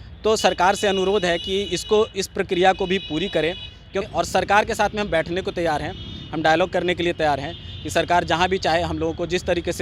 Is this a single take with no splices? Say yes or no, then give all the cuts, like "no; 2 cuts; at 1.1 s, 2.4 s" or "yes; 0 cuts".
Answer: no; 1 cut; at 4.1 s